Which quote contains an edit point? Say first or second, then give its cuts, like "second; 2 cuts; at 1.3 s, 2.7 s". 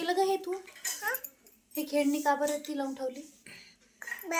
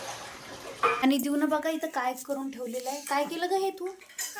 second; 1 cut; at 1.0 s